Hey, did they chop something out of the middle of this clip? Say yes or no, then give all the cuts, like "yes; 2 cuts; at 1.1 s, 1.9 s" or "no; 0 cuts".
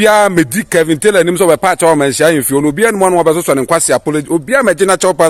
no; 0 cuts